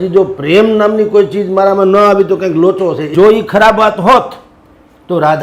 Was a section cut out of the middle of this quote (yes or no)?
yes